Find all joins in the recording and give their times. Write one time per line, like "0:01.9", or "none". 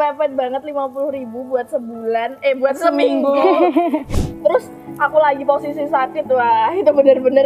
0:04.1